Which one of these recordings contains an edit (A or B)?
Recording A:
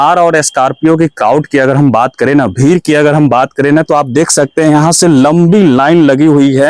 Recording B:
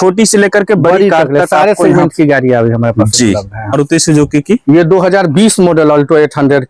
B